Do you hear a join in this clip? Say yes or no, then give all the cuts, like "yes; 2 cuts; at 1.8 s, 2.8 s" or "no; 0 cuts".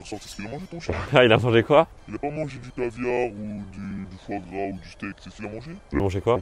no; 0 cuts